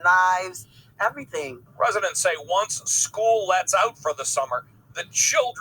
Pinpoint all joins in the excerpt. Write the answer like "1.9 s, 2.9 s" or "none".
1.6 s